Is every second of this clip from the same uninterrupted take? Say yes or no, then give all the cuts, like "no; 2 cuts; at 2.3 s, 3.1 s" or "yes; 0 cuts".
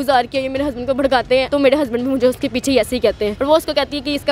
no; 2 cuts; at 1.5 s, 3.4 s